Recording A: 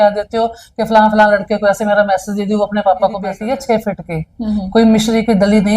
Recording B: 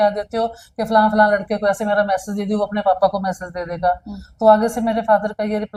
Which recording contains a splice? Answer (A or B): A